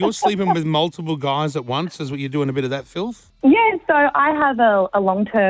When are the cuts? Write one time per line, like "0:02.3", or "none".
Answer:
none